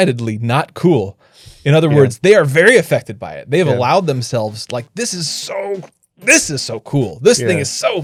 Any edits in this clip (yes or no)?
no